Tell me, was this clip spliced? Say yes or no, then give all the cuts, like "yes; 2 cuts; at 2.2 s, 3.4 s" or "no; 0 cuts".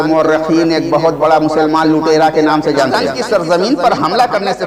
yes; 1 cut; at 3.0 s